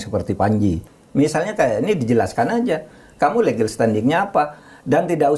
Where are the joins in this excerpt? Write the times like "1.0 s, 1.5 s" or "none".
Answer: 0.9 s